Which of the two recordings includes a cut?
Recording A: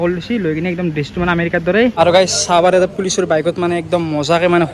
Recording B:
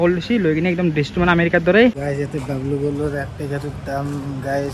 B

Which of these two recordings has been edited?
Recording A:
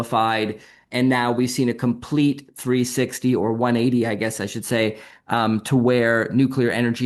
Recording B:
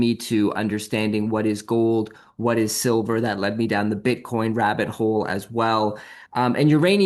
B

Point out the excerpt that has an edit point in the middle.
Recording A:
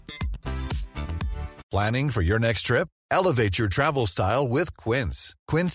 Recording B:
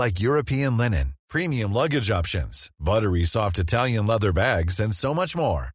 A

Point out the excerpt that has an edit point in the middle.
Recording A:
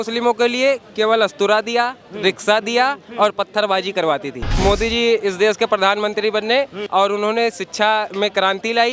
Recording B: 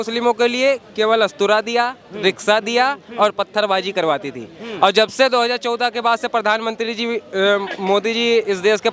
A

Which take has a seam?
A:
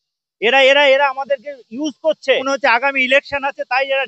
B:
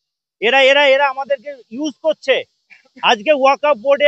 A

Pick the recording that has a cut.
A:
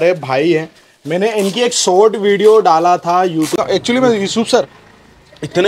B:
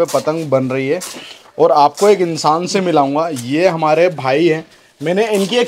A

